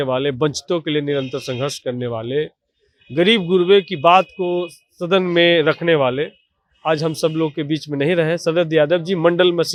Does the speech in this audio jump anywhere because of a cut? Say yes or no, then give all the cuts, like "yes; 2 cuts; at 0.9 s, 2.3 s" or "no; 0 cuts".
no; 0 cuts